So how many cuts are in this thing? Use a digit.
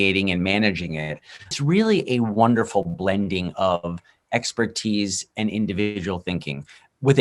1